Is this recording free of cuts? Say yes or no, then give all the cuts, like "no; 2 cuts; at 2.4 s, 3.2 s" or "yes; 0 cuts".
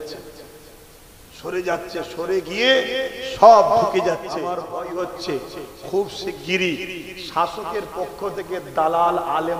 no; 1 cut; at 4.6 s